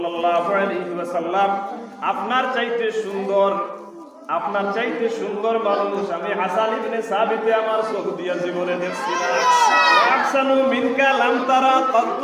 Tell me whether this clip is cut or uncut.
cut